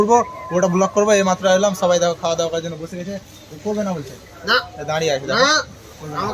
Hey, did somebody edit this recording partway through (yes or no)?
no